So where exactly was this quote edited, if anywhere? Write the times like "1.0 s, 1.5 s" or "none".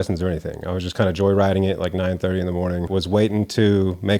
2.9 s